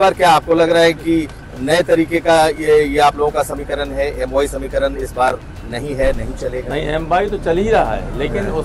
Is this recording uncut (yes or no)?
yes